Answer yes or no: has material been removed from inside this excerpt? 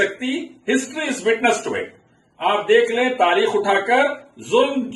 no